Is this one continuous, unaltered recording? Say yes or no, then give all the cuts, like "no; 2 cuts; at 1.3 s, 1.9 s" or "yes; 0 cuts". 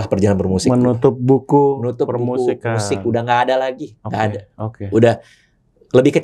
yes; 0 cuts